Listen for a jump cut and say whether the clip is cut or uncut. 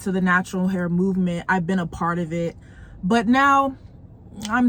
uncut